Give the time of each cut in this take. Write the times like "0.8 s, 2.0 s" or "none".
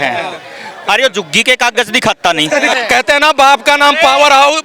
2.7 s